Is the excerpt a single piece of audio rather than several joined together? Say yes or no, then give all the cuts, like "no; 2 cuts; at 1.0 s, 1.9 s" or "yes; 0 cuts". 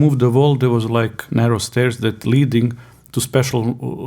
no; 1 cut; at 1.2 s